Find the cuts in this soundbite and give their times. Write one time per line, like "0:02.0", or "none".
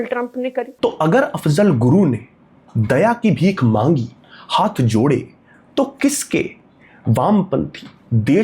none